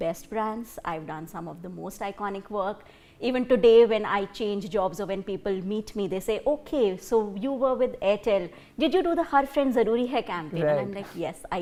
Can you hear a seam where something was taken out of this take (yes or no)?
no